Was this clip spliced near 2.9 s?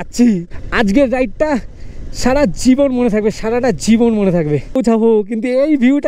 no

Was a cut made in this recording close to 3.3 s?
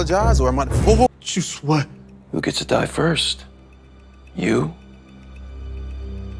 no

